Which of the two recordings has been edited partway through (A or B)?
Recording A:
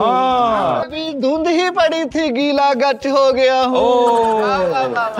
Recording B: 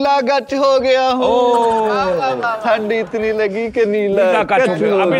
A